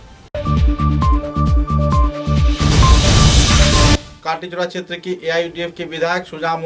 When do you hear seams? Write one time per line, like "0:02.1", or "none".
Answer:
0:04.1